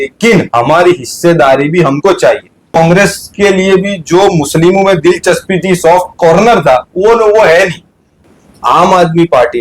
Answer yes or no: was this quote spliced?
yes